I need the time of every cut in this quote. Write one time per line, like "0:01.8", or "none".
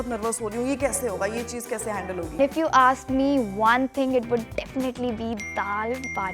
0:02.4

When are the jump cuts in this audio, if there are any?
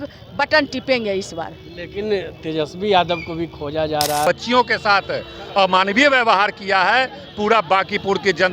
0:04.2

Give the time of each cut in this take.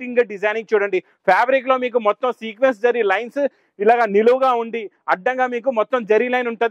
none

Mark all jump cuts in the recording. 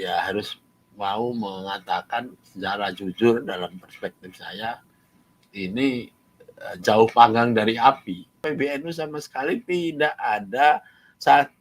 0:08.4

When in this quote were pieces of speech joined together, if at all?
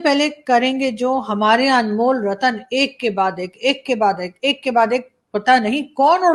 none

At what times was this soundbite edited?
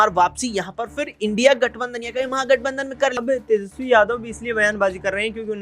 0:03.2

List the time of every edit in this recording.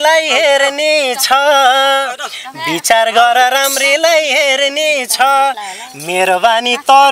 none

